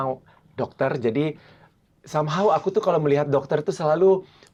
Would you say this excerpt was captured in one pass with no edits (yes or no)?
yes